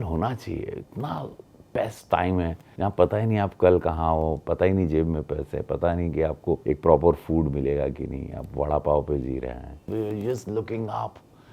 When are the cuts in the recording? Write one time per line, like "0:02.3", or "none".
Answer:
0:02.6
0:06.6
0:09.8